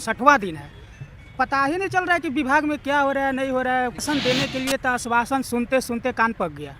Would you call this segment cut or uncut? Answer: cut